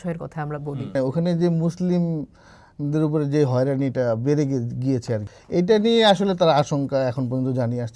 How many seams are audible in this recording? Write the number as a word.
two